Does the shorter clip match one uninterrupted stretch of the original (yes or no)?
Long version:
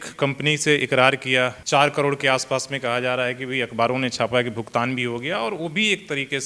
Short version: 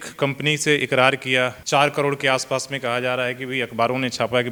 yes